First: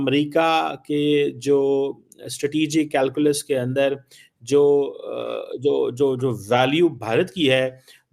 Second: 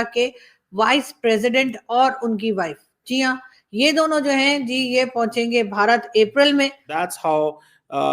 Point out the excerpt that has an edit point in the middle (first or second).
second